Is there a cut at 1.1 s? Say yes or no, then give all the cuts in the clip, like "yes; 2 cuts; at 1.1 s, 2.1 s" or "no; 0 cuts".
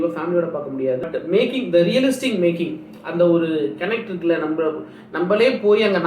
yes; 1 cut; at 1.1 s